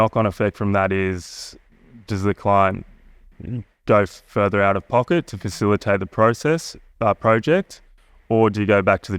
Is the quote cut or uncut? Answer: uncut